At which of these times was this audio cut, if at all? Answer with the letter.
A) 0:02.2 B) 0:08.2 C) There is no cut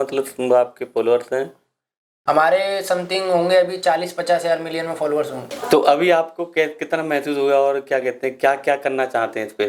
C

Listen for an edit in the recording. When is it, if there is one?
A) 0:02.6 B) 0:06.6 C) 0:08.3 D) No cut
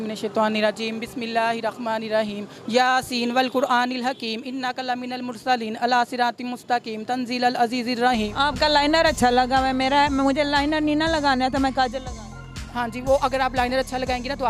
C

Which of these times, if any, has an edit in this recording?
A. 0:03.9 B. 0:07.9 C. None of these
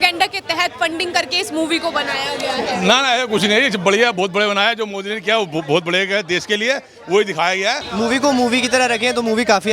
B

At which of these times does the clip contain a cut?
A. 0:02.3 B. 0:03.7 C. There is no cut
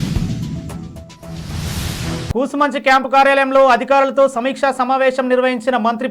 A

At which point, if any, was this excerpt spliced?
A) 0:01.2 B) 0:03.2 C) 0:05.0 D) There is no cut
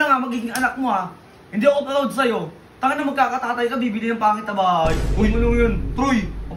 D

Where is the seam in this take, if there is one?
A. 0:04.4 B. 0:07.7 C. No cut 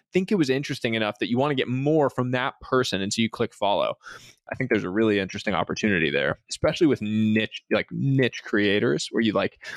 A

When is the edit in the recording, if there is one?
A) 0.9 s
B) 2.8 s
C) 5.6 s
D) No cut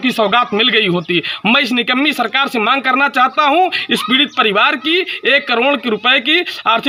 D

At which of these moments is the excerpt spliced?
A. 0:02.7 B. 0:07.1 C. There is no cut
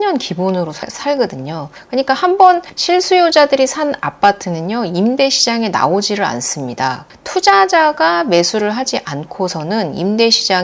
B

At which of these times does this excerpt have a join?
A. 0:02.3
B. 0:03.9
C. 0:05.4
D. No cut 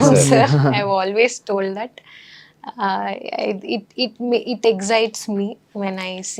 D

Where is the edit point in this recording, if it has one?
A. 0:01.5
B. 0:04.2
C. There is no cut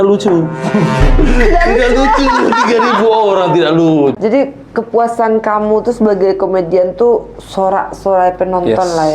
B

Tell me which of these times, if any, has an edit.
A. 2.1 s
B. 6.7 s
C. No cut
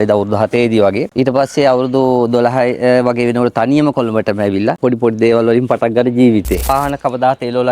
B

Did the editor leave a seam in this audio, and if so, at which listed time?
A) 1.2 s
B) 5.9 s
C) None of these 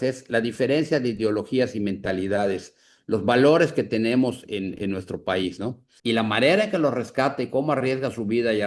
B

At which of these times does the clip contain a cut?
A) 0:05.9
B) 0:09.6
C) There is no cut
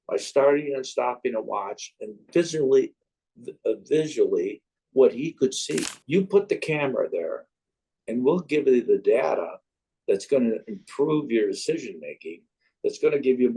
A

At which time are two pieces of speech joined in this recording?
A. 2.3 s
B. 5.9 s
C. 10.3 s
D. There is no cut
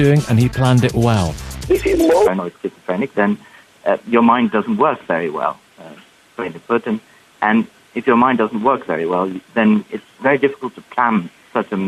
D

